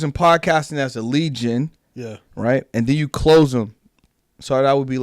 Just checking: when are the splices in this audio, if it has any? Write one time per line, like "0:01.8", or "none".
none